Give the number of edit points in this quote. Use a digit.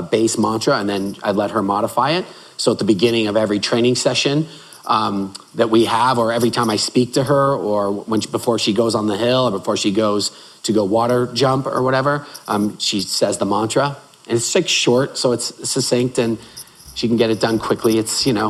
0